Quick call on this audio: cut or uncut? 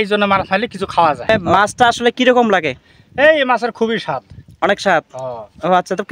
cut